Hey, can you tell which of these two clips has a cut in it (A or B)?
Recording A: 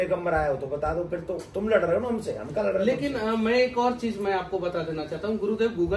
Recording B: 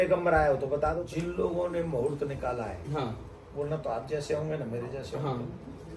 B